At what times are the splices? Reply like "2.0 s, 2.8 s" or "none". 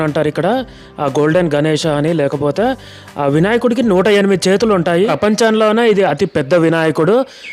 5.1 s